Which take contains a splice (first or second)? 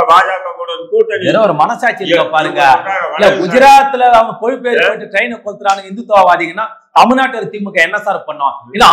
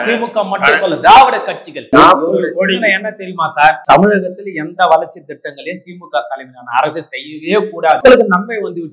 second